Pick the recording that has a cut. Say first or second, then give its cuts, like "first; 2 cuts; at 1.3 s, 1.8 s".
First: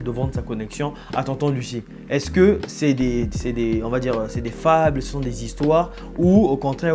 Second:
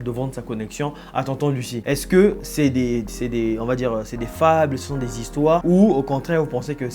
second; 2 cuts; at 1.8 s, 5.6 s